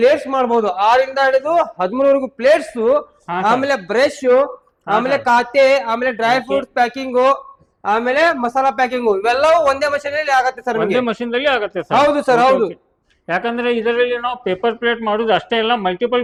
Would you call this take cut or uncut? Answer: uncut